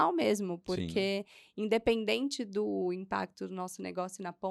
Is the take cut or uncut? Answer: uncut